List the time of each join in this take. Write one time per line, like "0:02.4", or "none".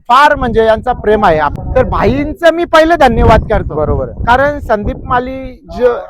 0:01.5